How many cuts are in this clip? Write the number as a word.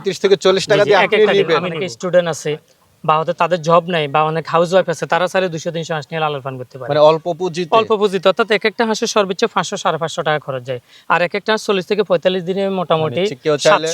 one